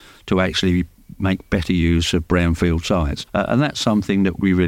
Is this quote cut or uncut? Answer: uncut